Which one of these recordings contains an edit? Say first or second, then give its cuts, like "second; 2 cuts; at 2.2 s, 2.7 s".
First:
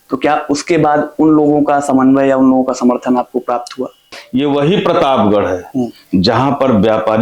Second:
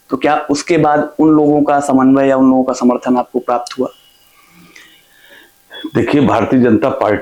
first; 1 cut; at 4.2 s